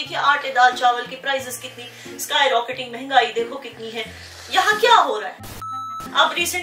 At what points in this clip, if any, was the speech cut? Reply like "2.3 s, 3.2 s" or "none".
5.7 s